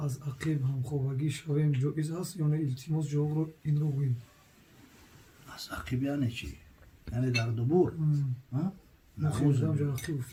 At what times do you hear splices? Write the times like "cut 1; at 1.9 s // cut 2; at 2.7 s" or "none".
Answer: none